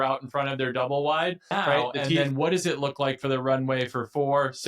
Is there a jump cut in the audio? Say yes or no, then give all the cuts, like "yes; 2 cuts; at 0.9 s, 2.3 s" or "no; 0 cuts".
yes; 1 cut; at 2.2 s